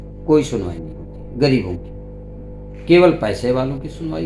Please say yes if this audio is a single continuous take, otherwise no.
yes